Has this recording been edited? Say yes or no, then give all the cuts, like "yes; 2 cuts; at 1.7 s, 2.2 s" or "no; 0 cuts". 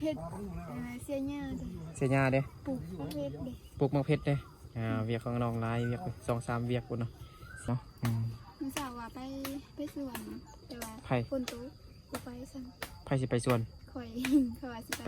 yes; 1 cut; at 7.7 s